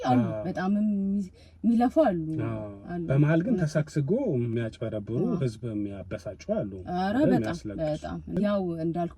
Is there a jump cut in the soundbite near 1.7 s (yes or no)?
no